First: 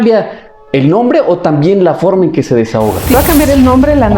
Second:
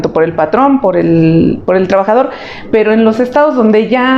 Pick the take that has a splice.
first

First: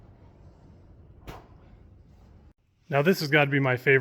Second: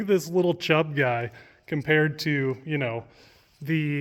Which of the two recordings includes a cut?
first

